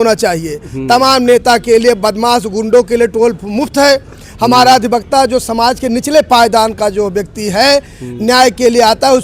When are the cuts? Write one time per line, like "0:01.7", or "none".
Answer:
none